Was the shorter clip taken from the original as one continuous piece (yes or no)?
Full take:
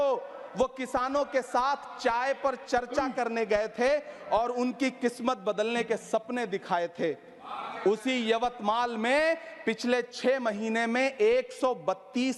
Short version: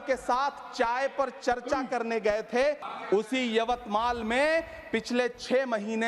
no